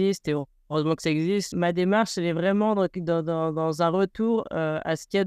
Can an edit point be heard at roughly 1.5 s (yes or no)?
yes